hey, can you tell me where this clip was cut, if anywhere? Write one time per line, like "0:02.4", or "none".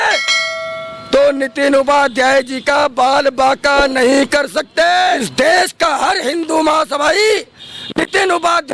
0:05.3